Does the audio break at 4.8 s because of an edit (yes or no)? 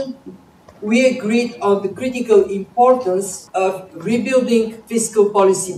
yes